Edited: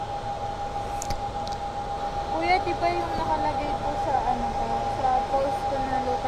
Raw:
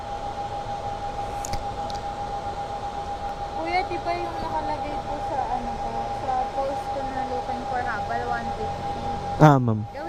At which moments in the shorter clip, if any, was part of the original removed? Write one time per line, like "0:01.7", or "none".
0:02.0